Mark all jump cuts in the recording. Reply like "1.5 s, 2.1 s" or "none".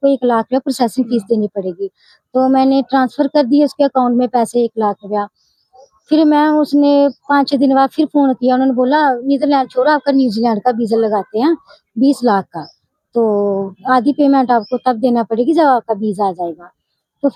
none